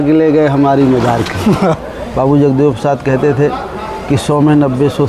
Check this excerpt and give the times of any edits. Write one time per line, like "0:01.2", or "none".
0:01.9